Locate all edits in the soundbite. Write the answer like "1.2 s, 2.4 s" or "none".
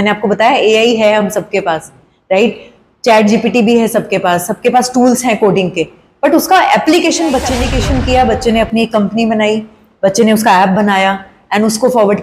7.6 s